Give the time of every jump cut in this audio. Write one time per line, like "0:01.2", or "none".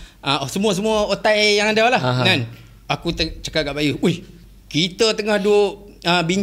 none